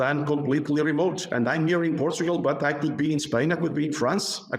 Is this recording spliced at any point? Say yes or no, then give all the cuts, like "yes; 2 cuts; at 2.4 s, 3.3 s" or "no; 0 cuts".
no; 0 cuts